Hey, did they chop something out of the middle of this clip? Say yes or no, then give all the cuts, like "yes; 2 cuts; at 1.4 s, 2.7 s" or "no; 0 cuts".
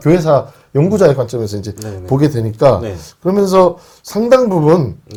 no; 0 cuts